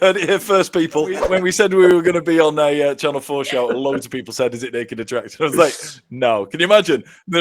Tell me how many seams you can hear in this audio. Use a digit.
1